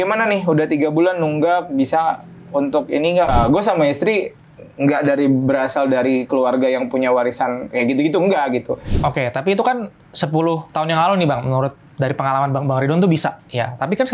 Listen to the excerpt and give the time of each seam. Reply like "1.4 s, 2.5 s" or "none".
3.3 s, 8.9 s